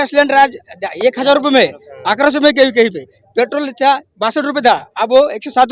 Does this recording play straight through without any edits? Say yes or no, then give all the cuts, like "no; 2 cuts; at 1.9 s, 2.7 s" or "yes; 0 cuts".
yes; 0 cuts